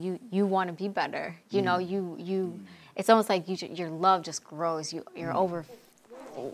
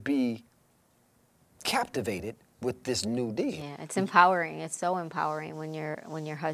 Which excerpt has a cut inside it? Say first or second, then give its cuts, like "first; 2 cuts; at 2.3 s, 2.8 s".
second; 1 cut; at 3.6 s